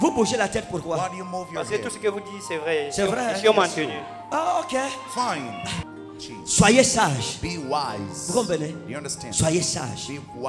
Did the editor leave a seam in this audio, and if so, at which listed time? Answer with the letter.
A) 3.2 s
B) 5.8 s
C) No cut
B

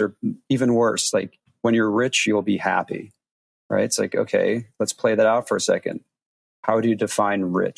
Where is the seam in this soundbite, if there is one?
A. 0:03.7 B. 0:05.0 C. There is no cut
C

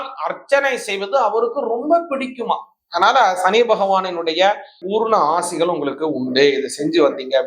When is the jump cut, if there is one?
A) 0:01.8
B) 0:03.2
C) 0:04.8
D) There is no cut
C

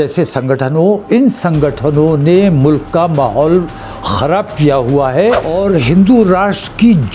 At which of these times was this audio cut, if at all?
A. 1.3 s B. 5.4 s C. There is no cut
B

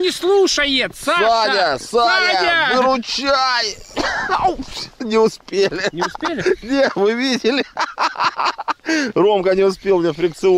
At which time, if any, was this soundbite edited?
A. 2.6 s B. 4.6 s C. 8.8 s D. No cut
D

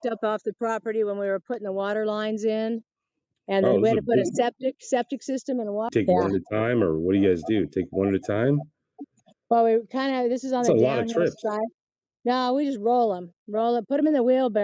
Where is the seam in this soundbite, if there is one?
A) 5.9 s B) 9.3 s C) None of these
A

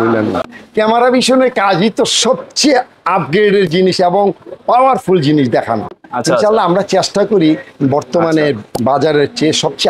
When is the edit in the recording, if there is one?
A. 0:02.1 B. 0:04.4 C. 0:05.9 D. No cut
D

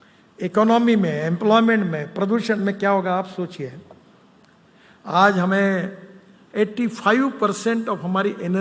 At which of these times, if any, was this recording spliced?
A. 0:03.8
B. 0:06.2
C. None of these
C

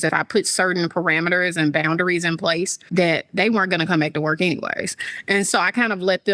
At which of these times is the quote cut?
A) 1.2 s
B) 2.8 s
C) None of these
B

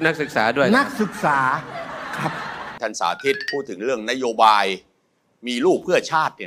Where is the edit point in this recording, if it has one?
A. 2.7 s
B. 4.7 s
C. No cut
A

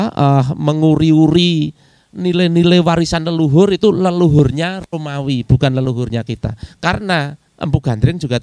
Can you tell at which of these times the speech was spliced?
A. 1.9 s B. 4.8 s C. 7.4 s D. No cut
C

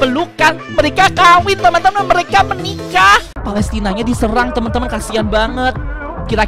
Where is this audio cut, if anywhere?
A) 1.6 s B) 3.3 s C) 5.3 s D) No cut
B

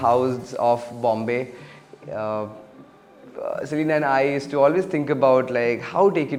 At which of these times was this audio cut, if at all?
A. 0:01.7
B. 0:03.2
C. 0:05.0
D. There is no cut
D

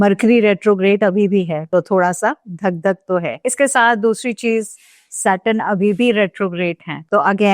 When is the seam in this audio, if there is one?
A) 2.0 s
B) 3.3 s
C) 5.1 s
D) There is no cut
B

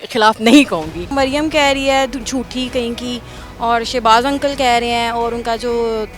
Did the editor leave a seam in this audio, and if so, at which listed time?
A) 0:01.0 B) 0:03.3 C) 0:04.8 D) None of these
A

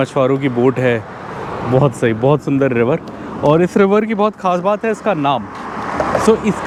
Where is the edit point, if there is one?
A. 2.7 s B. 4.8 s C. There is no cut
C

